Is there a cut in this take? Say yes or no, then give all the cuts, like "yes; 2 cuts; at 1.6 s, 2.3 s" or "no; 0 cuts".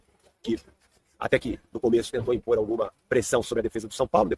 no; 0 cuts